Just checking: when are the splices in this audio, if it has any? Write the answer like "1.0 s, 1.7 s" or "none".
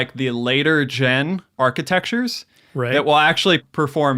1.5 s